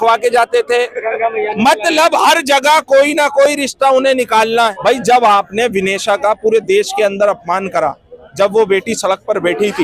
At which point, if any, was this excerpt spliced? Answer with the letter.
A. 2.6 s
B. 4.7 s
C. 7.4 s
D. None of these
B